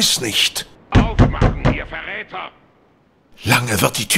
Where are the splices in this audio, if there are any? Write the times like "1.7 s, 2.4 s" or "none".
none